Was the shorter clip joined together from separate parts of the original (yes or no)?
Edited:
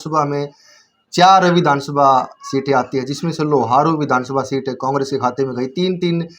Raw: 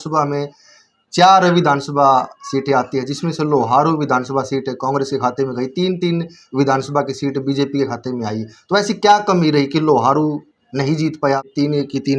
no